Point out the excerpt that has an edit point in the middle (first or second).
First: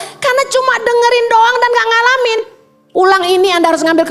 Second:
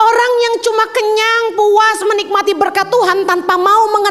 first